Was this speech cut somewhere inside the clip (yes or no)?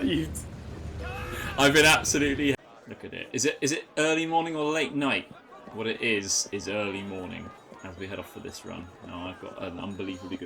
no